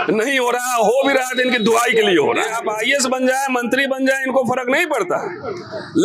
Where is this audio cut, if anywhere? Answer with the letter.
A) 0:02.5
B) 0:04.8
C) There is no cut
A